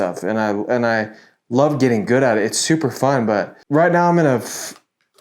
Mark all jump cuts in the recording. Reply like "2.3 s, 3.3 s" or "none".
3.6 s